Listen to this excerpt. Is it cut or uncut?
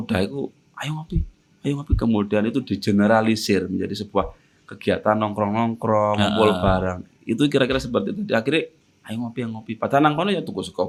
uncut